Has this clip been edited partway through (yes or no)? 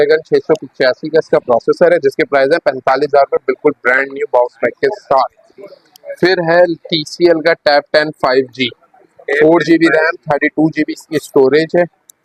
no